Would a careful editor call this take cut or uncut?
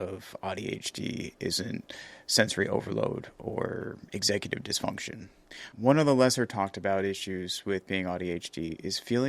uncut